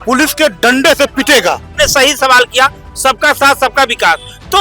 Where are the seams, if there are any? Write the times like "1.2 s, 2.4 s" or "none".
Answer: 1.7 s